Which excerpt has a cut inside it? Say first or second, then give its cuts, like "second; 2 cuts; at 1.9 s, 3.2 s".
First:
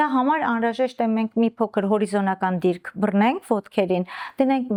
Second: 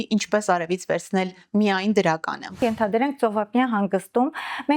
second; 1 cut; at 2.6 s